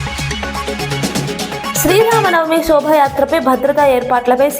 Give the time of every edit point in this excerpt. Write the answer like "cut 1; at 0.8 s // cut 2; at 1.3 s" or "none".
cut 1; at 1.8 s